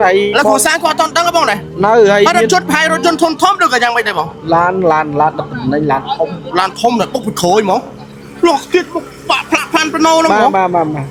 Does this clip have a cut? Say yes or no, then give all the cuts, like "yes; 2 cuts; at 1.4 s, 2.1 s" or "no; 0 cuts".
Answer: no; 0 cuts